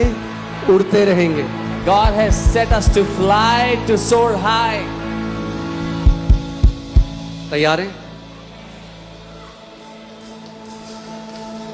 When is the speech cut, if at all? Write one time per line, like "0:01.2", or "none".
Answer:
none